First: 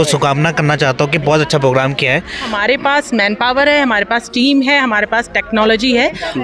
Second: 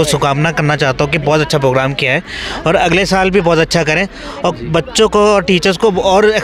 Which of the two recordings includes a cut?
first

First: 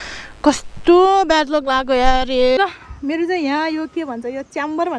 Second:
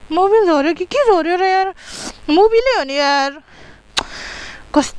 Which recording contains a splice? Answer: first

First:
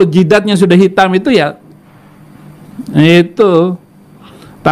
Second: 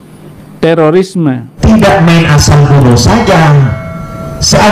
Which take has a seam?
second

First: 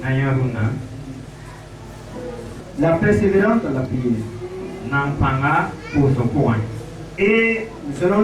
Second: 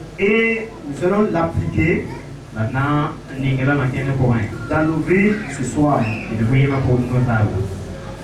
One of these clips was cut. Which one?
first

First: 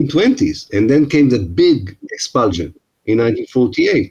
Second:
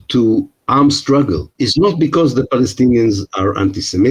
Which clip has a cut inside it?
second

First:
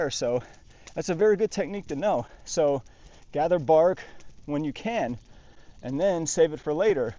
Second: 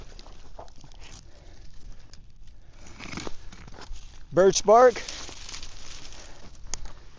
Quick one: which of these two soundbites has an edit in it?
second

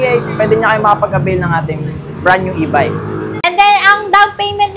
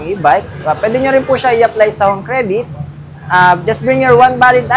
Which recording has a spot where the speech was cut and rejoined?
first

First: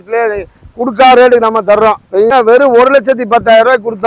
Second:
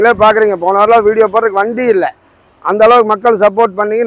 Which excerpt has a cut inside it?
first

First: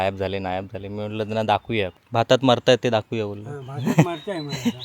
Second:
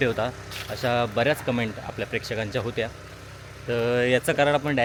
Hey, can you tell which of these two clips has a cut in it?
first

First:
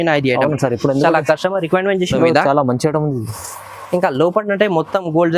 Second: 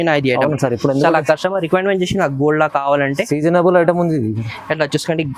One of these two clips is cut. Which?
first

